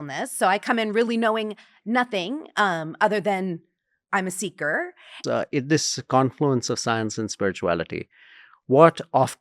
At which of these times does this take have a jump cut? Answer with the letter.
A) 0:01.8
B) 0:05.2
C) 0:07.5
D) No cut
B